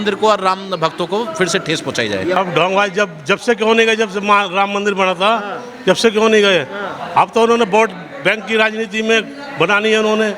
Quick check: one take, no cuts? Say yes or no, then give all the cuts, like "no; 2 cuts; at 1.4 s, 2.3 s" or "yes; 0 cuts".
no; 1 cut; at 2.4 s